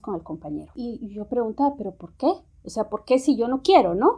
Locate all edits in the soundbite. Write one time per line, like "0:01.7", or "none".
none

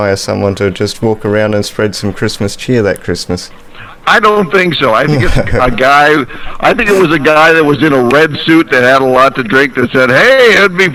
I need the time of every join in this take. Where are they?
none

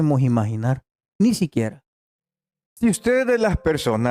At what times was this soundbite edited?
0:02.6

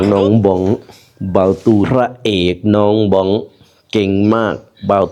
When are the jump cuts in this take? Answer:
0:01.9

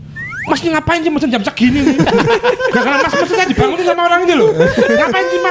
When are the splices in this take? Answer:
none

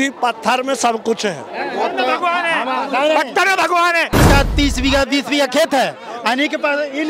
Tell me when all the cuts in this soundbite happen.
0:04.2

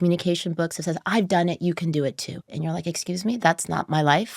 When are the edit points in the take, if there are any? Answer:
0:02.5

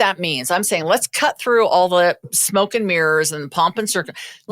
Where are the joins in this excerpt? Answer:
0:02.2

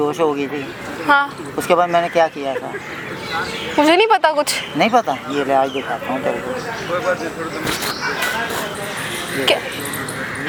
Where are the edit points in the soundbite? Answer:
none

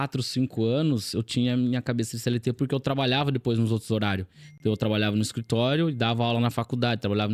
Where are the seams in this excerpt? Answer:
none

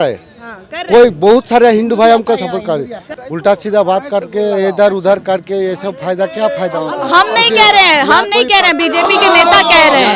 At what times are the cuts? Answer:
0:03.0

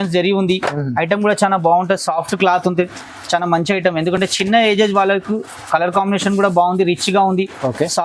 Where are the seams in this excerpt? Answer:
none

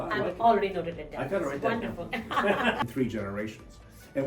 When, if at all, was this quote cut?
0:02.8

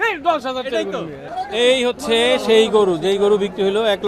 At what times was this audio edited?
none

